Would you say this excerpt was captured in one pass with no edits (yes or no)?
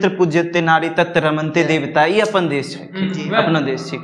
yes